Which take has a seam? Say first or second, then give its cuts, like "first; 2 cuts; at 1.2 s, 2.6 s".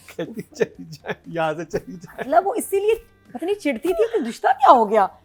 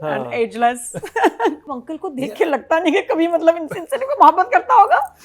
second; 1 cut; at 1.7 s